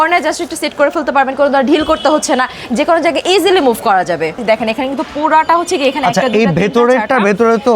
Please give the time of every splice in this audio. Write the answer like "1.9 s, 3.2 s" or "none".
4.3 s